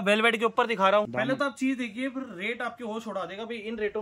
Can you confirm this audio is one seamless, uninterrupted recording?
no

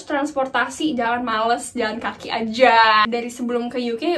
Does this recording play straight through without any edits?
no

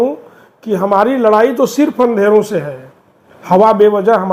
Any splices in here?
no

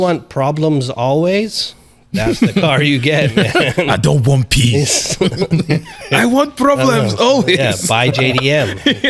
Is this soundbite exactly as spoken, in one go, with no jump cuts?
yes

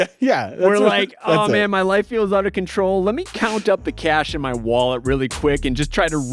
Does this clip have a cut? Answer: no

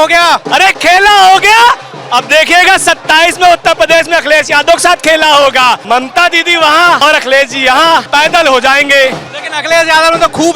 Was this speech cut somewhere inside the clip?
yes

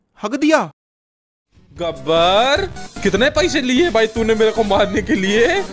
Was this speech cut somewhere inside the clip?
yes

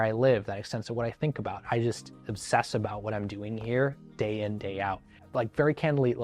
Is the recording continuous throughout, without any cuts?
no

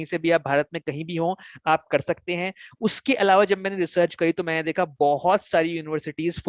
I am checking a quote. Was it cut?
no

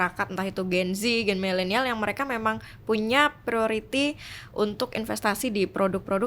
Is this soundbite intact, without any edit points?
yes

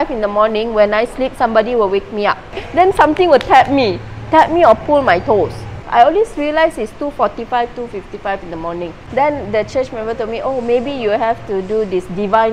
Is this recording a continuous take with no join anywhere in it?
no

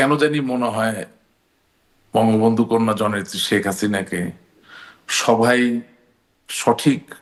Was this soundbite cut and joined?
no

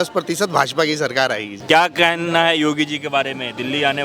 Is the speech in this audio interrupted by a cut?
yes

